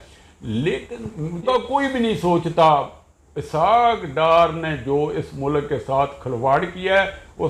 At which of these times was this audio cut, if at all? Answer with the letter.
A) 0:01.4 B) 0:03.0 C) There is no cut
A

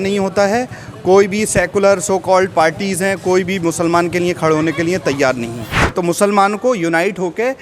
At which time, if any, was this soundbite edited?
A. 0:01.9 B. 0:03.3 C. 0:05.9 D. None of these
C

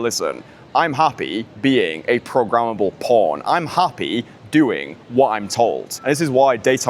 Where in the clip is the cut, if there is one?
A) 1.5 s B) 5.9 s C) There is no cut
B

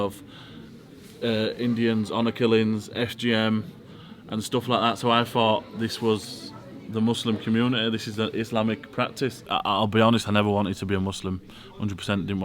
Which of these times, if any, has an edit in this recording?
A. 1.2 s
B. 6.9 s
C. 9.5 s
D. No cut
C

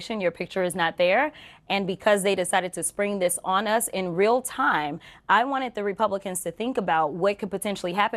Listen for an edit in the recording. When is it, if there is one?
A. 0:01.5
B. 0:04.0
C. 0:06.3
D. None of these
D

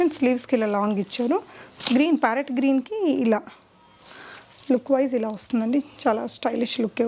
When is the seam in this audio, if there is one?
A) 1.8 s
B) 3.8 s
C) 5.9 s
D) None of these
D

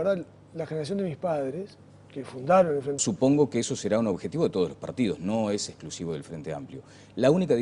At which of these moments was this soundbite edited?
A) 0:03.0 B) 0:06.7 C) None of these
C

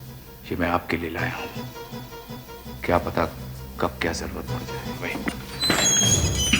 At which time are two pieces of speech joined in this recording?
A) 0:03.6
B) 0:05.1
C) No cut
B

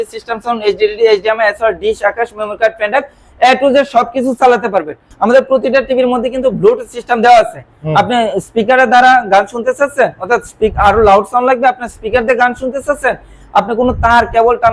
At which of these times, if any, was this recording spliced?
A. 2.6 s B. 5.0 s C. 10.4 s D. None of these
B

